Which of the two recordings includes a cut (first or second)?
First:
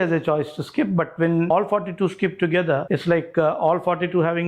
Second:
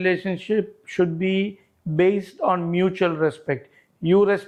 first